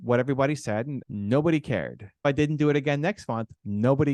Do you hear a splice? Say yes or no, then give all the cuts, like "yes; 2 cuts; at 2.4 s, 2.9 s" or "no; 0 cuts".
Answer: yes; 2 cuts; at 1.0 s, 2.2 s